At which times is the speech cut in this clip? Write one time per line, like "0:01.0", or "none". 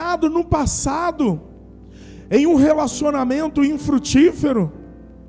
none